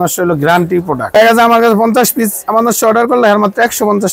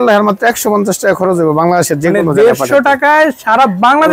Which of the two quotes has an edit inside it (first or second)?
first